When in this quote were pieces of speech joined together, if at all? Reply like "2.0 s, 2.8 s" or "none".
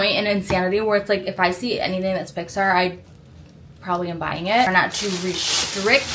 4.7 s